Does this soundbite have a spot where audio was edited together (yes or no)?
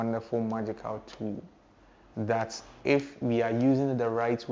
no